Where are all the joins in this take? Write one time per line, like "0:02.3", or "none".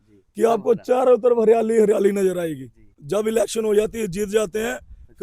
0:03.0